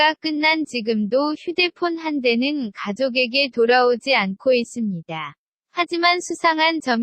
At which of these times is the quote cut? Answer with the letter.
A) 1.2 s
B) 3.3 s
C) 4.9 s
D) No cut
C